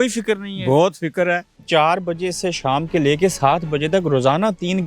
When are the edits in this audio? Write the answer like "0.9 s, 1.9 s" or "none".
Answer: 1.6 s